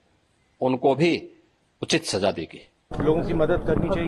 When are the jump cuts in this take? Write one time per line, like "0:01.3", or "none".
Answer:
0:02.9